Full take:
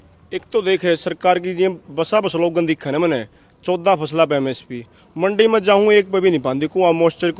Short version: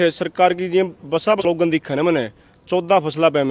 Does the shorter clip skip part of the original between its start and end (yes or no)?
yes